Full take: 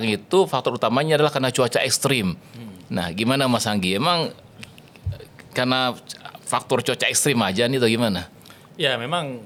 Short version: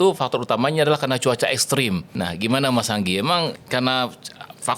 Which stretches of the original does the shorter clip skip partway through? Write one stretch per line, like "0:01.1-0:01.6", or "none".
0:02.4-0:02.9
0:04.4-0:05.5